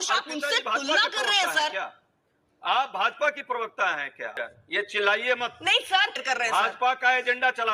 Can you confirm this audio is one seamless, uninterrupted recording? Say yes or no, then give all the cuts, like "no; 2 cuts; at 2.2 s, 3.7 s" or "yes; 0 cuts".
no; 2 cuts; at 4.3 s, 6.2 s